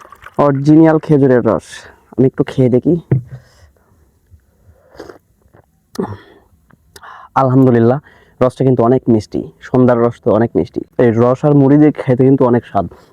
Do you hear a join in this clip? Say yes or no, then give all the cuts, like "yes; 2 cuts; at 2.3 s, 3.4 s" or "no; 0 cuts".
yes; 1 cut; at 10.9 s